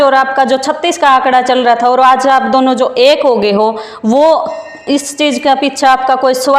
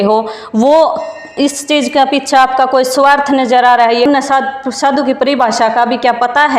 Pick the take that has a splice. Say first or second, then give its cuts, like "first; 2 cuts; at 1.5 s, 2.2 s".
second; 1 cut; at 4.1 s